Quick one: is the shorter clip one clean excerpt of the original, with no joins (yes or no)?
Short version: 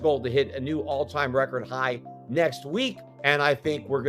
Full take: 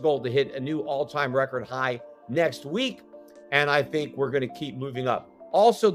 no